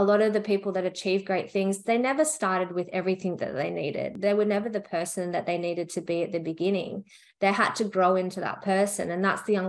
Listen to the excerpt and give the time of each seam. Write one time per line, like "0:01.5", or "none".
0:04.1